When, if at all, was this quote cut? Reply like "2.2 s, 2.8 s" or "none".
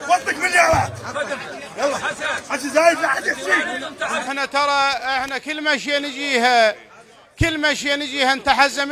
4.3 s